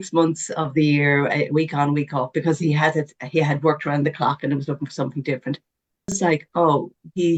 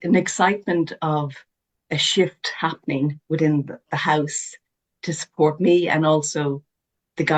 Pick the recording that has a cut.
first; 1 cut; at 6.2 s

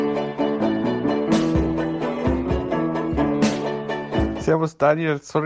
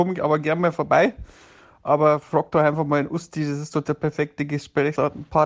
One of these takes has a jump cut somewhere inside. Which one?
first; 1 cut; at 3.8 s

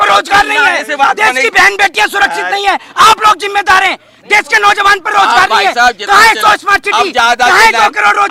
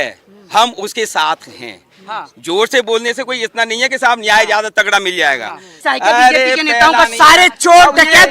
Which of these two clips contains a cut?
second; 2 cuts; at 5.7 s, 6.9 s

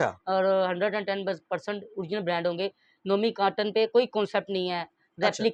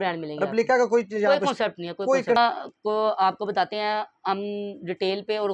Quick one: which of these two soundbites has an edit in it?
second; 1 cut; at 2.4 s

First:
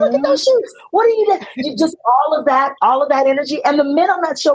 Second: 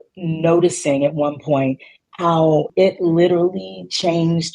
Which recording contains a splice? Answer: second; 1 cut; at 2.7 s

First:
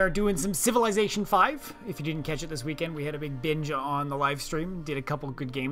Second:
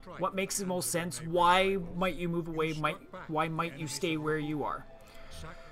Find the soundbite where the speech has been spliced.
second; 1 cut; at 1.9 s

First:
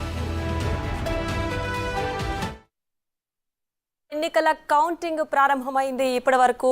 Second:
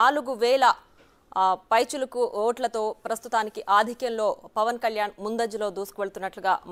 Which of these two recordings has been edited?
first; 1 cut; at 2.4 s

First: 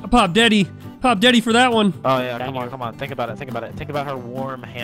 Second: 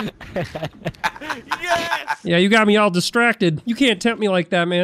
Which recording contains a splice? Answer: second; 2 cuts; at 2.2 s, 3.6 s

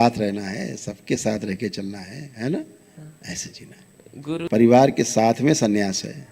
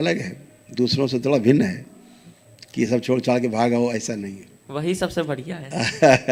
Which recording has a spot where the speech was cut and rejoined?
first; 1 cut; at 4.5 s

